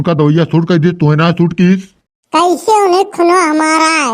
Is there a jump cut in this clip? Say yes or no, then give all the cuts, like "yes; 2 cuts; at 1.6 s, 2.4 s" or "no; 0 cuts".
yes; 1 cut; at 2.2 s